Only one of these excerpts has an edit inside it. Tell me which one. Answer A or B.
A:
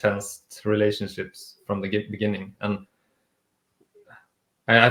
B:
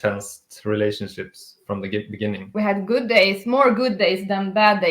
B